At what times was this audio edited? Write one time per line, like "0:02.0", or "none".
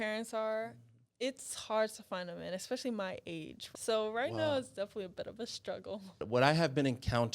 0:03.7
0:06.2